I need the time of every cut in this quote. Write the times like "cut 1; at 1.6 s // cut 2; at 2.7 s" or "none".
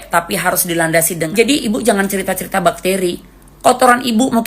cut 1; at 1.3 s